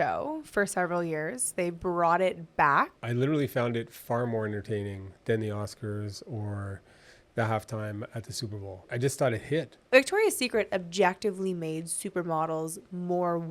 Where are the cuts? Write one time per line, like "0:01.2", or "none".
0:03.0
0:09.8